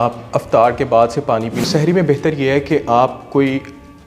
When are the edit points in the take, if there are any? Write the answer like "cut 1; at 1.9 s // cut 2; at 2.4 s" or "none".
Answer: cut 1; at 1.6 s